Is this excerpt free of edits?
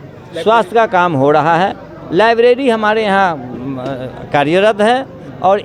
yes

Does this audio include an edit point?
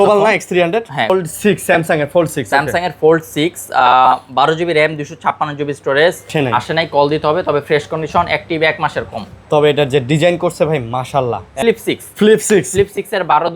yes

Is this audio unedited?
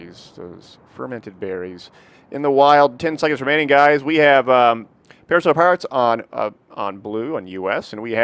yes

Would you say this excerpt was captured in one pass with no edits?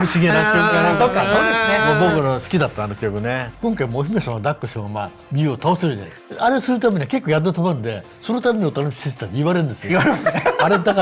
no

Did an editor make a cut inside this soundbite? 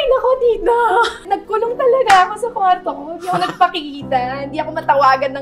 yes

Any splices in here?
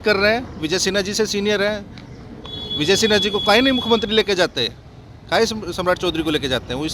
no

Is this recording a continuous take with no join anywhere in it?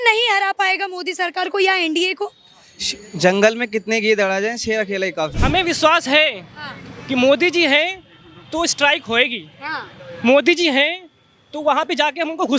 no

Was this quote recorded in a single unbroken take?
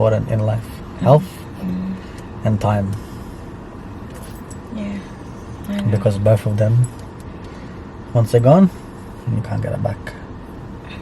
yes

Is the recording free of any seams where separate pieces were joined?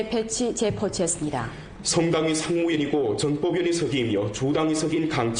no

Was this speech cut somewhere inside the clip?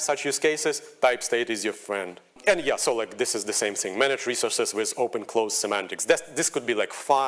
yes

